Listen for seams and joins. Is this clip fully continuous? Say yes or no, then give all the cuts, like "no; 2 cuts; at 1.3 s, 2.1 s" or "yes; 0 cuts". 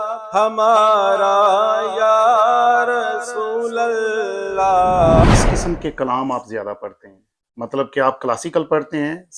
no; 1 cut; at 5.2 s